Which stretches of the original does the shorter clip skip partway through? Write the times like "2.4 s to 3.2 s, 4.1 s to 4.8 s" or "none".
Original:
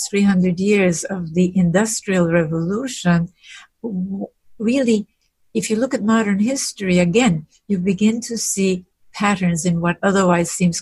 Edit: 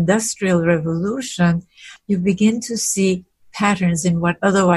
3.6 s to 7.5 s